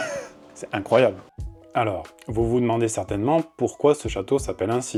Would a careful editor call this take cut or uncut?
uncut